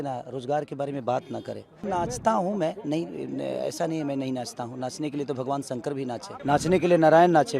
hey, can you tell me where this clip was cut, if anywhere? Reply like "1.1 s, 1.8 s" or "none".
1.8 s, 6.3 s